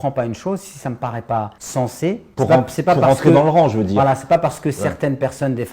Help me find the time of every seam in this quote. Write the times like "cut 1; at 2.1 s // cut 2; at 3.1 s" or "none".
cut 1; at 2.1 s